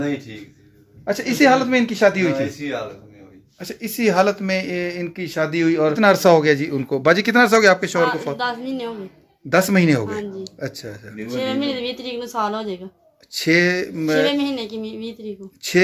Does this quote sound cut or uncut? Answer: cut